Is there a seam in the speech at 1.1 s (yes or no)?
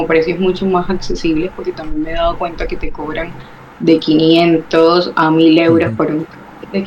no